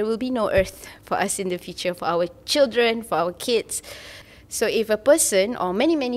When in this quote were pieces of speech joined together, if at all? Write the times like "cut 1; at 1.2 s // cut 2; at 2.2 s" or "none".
cut 1; at 4.2 s